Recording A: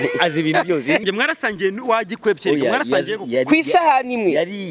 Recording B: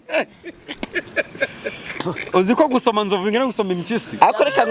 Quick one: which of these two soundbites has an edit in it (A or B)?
A